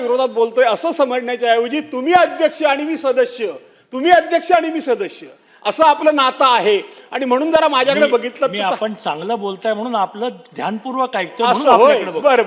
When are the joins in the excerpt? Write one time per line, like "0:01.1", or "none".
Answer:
none